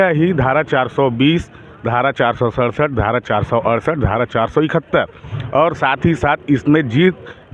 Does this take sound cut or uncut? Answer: uncut